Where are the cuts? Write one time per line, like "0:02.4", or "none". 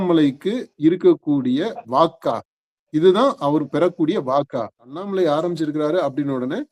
0:05.0